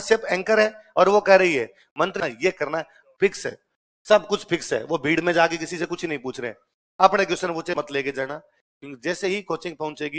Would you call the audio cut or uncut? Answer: cut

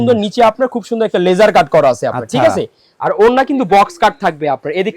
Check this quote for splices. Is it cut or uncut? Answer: uncut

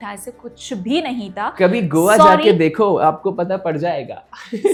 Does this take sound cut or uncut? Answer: uncut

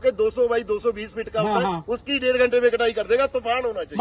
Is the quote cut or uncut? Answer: uncut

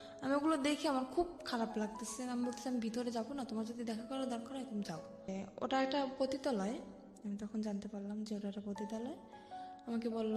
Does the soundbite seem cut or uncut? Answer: cut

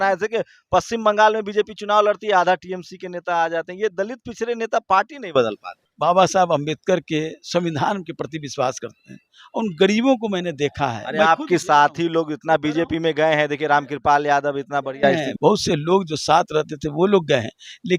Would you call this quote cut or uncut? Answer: cut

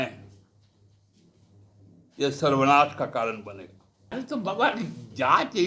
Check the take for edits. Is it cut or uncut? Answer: cut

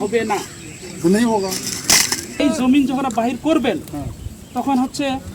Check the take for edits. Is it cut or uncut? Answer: cut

